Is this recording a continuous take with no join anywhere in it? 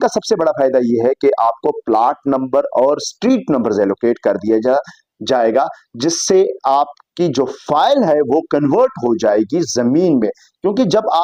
yes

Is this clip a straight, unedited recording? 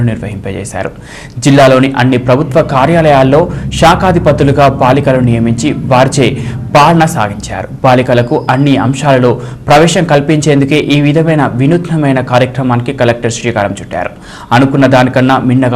yes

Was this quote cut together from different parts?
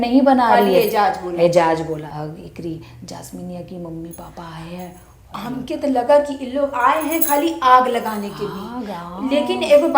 yes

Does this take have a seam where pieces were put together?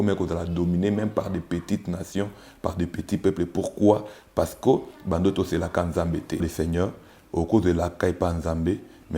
yes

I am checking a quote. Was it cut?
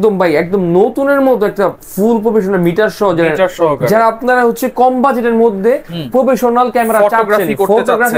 no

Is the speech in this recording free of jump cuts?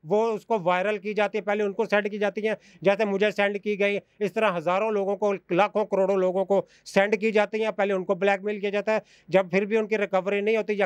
yes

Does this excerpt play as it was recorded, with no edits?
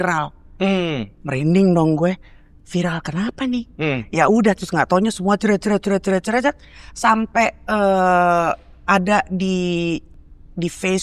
yes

